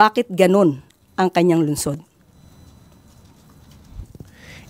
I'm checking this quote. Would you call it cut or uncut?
uncut